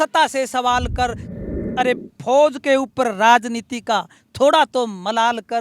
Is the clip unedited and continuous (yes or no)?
no